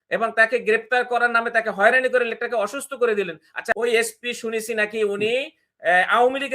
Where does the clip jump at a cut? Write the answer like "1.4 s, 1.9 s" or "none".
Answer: 3.7 s